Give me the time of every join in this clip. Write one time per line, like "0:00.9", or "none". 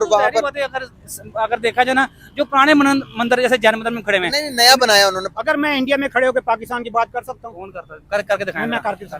0:05.2